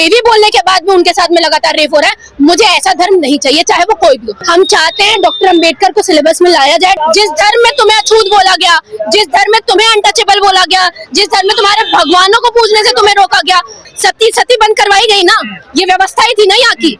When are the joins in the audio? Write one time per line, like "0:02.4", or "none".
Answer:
0:04.3
0:07.0
0:13.9